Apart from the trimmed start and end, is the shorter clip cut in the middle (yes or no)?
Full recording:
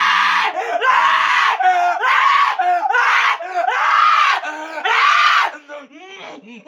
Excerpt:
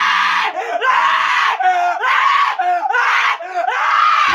no